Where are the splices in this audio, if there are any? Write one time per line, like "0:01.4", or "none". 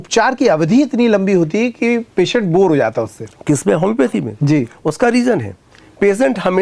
none